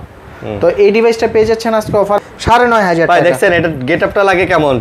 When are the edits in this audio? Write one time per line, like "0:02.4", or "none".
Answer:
0:02.2